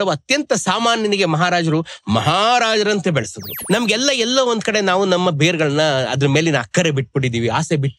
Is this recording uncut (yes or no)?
no